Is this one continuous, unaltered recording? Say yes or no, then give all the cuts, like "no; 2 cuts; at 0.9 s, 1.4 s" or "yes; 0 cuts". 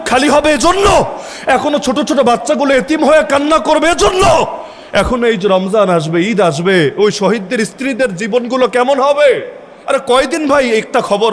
yes; 0 cuts